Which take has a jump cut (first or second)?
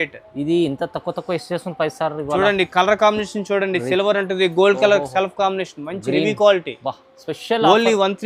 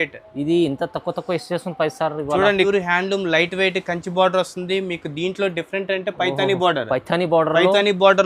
second